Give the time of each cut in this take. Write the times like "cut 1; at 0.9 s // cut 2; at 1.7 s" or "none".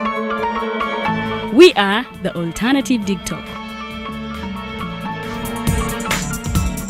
none